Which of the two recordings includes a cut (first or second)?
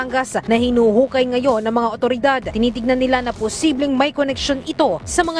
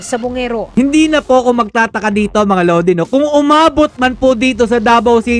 first